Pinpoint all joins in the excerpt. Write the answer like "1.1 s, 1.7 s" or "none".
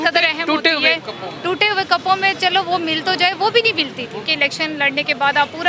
4.2 s